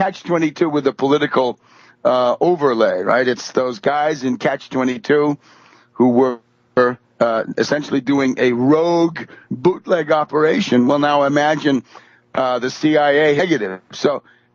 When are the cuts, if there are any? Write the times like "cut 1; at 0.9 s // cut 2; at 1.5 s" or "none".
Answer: none